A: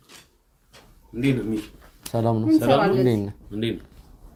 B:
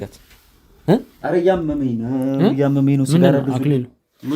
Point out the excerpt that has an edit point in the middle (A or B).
B